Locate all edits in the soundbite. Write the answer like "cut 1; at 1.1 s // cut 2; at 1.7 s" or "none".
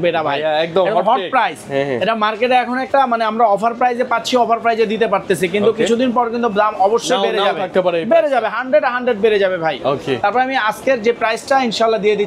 none